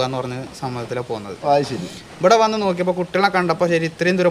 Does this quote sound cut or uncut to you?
uncut